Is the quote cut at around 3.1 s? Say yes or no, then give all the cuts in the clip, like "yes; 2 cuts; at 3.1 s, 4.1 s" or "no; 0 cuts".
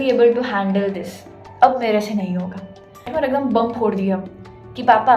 yes; 1 cut; at 3.1 s